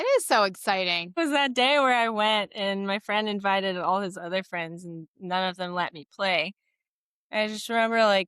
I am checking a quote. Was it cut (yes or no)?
yes